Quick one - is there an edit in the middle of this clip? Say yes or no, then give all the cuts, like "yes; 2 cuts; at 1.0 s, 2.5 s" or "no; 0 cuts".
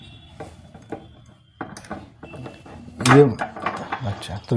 no; 0 cuts